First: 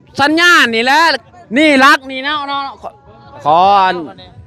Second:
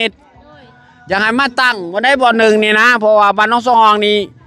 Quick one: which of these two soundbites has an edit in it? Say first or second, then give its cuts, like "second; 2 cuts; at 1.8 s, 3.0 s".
first; 2 cuts; at 1.2 s, 3.4 s